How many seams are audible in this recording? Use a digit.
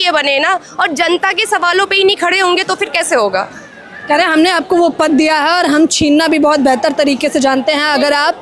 0